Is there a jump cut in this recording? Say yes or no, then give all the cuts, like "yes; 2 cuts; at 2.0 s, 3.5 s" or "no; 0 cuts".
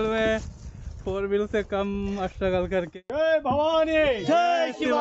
yes; 1 cut; at 2.9 s